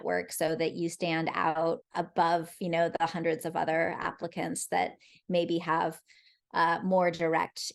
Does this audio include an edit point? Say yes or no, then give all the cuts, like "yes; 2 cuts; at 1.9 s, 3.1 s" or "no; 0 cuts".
yes; 1 cut; at 1.9 s